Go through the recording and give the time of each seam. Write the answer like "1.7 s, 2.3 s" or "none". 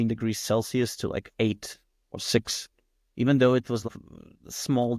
3.9 s